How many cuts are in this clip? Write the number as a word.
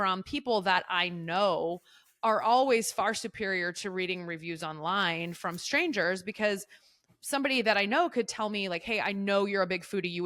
zero